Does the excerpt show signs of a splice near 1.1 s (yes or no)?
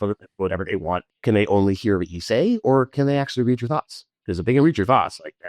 yes